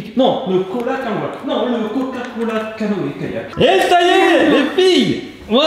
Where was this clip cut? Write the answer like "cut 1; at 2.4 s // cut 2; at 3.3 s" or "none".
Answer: cut 1; at 3.5 s